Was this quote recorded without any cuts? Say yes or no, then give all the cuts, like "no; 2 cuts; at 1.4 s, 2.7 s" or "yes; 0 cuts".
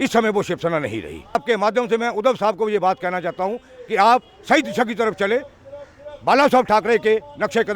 no; 1 cut; at 1.3 s